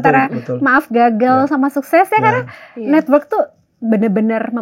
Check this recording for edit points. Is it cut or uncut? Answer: uncut